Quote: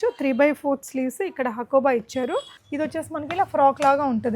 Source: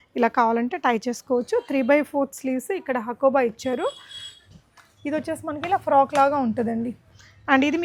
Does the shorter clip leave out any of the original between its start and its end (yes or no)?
yes